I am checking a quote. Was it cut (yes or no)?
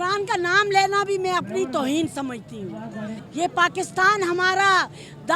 no